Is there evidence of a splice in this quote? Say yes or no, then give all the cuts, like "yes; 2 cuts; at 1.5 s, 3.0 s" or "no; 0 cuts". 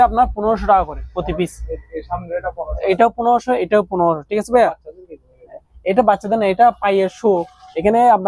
no; 0 cuts